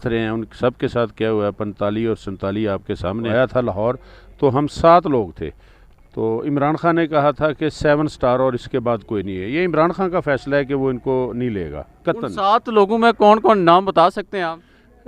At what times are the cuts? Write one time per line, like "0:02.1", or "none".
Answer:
0:03.3